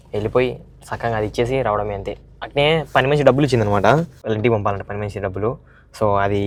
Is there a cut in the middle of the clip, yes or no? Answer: no